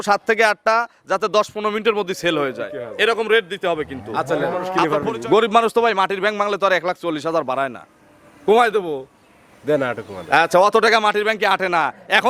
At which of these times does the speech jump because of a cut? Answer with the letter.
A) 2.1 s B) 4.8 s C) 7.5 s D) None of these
B